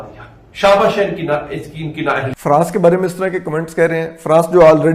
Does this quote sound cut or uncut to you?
cut